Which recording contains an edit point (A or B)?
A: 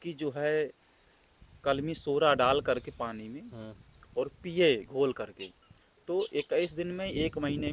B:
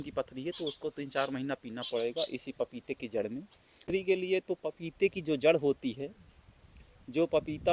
B